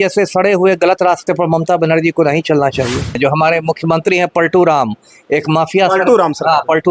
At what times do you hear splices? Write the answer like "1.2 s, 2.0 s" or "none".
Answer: 3.2 s